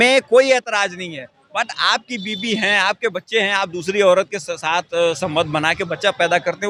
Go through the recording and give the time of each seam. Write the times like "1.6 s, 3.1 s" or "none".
none